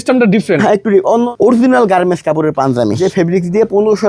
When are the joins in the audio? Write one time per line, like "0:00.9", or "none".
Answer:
0:01.3
0:03.0